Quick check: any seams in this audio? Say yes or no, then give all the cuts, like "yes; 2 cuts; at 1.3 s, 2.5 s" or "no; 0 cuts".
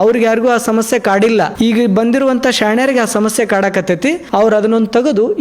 yes; 2 cuts; at 1.5 s, 4.2 s